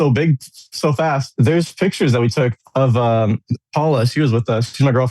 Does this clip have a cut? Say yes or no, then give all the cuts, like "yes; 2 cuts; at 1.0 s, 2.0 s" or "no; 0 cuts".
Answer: yes; 1 cut; at 1.3 s